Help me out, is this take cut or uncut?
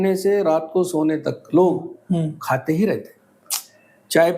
uncut